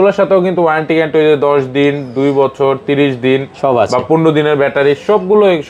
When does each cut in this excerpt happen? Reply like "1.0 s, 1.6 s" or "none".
none